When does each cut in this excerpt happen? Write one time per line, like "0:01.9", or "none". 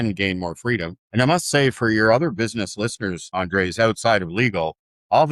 none